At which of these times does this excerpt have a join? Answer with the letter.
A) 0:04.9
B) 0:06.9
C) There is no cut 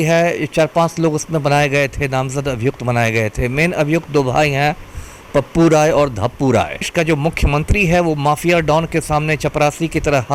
B